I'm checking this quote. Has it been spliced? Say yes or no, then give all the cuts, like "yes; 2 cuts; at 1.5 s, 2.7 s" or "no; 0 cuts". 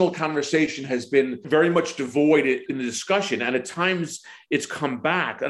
yes; 2 cuts; at 1.4 s, 2.7 s